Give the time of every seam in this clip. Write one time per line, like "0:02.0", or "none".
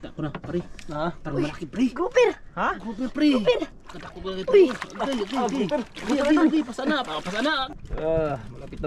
0:07.6

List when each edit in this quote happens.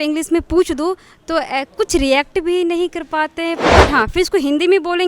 0:03.7

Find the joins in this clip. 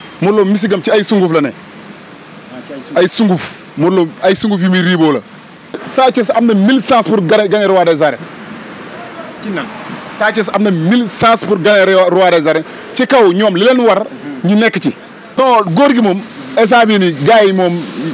0:05.9
0:15.2

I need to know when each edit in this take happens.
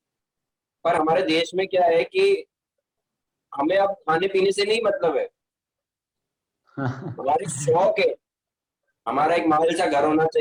none

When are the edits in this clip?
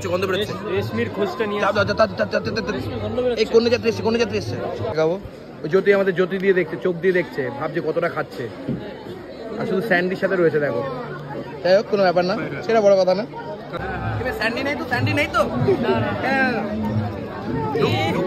0:05.0
0:13.8

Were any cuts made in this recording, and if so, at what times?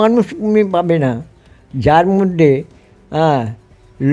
none

